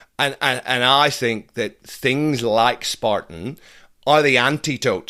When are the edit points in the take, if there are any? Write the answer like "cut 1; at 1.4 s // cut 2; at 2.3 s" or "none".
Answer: none